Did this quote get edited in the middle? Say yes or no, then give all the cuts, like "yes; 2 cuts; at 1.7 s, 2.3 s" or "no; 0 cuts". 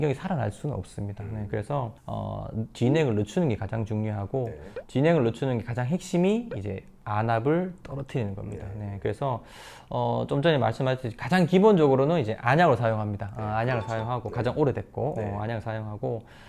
no; 0 cuts